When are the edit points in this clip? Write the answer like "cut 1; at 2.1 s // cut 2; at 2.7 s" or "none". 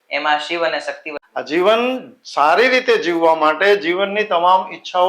cut 1; at 1.1 s